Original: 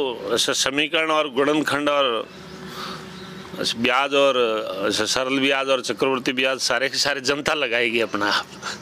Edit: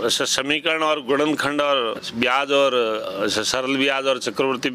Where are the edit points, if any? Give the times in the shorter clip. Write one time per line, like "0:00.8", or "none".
0:02.0

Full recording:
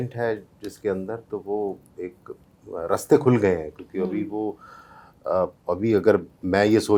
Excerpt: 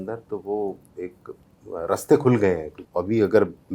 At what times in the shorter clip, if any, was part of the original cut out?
0:02.8

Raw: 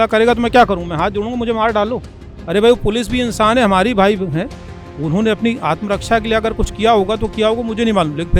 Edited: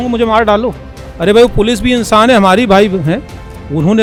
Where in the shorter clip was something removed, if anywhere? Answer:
none

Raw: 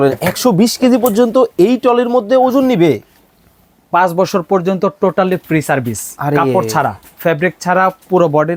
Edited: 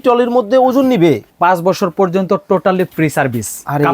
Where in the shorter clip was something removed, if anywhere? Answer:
0:01.3

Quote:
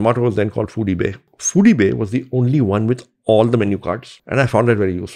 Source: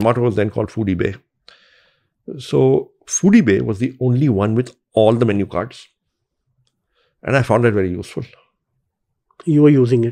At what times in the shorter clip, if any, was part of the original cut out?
0:01.3
0:04.1

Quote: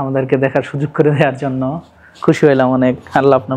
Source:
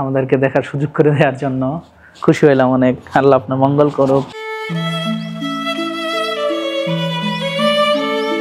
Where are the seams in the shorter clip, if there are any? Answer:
none

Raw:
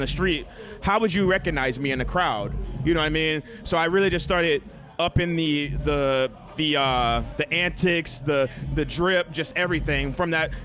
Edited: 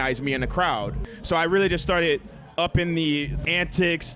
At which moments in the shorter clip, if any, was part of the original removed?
0:01.1
0:03.4

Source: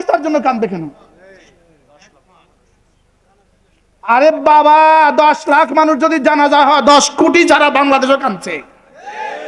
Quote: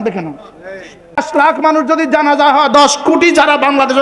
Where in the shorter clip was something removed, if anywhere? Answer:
0:01.2

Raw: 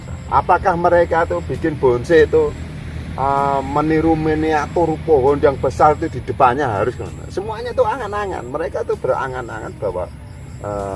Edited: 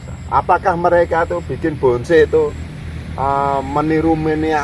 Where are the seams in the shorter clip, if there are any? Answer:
none

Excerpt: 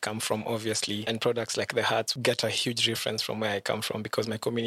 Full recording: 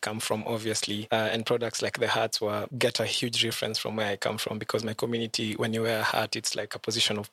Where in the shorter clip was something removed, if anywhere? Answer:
0:01.1
0:02.1

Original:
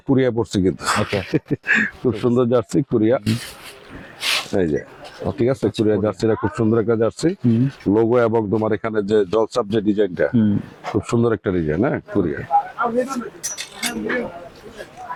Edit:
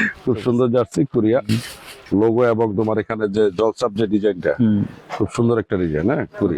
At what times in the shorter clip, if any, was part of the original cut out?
0:02.0

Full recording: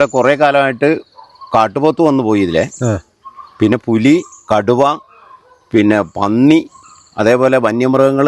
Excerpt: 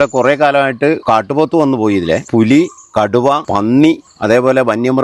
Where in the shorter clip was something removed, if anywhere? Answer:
0:01.0
0:02.3
0:03.5
0:04.1

